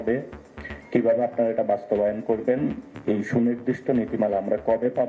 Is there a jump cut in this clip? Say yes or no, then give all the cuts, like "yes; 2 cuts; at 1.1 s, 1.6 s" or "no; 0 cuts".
no; 0 cuts